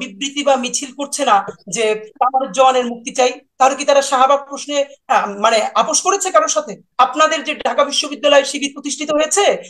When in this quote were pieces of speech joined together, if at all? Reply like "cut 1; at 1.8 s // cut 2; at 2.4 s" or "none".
cut 1; at 6.8 s